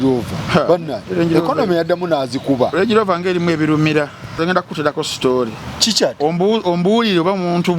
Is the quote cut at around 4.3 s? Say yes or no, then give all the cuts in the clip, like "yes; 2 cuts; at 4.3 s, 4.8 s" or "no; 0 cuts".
yes; 1 cut; at 4.3 s